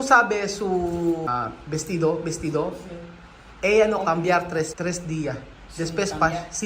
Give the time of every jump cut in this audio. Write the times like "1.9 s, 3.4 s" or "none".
1.3 s, 4.7 s